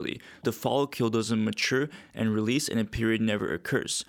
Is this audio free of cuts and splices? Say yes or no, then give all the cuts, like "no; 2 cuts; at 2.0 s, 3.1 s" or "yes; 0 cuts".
yes; 0 cuts